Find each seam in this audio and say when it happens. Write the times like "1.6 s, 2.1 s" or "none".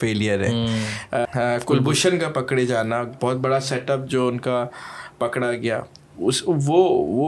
1.3 s